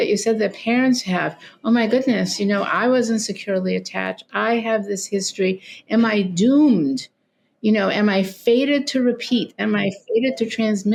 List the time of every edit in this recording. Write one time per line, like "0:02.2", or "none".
none